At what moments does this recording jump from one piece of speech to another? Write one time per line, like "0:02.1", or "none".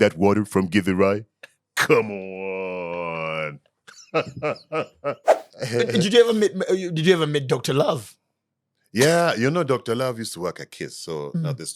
0:05.5